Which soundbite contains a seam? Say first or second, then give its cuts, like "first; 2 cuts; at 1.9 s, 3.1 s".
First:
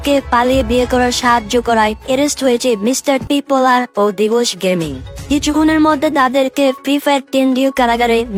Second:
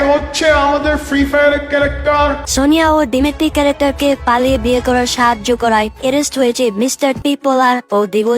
second; 1 cut; at 2.4 s